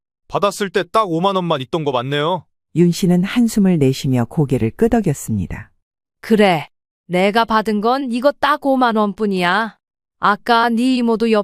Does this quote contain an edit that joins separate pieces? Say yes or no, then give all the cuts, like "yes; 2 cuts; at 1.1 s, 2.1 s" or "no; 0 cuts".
no; 0 cuts